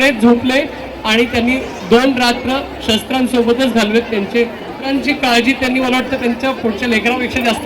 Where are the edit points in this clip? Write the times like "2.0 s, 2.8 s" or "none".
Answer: 4.8 s